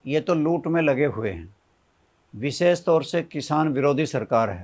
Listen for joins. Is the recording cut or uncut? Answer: uncut